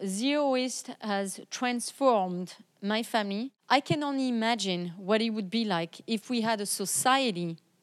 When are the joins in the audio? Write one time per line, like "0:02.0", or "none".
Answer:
0:03.5